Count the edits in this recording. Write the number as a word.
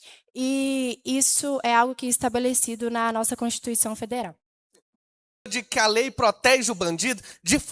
one